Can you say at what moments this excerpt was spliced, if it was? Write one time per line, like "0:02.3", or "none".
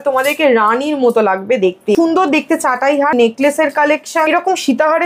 0:02.0
0:03.1
0:04.3